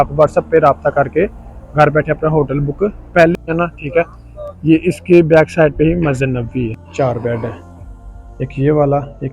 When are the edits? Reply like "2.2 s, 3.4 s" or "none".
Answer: 3.5 s, 6.8 s